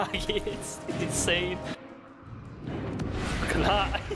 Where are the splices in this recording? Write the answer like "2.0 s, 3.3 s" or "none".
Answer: 1.8 s